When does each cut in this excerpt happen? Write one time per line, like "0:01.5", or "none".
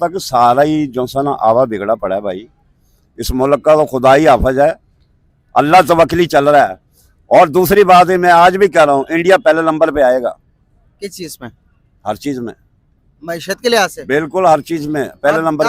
none